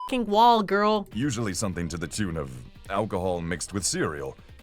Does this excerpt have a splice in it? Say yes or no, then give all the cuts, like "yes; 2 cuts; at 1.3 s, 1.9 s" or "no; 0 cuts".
yes; 1 cut; at 1.1 s